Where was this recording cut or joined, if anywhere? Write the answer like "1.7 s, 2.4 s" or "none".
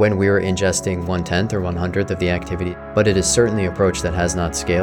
2.8 s